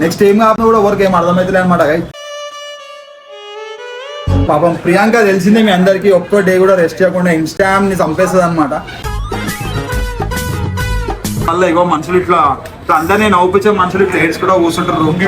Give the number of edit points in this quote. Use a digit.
2